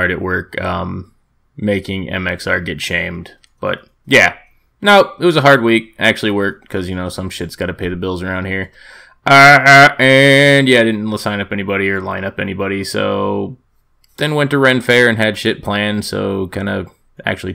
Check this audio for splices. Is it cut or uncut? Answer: cut